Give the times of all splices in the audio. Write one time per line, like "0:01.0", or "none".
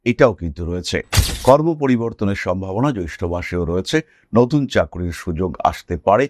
0:01.2